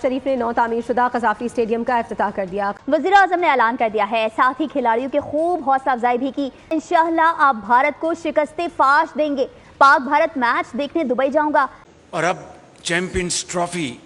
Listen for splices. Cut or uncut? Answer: cut